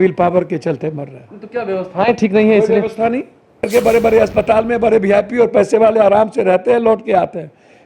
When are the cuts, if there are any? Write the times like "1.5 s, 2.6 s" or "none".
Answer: 3.6 s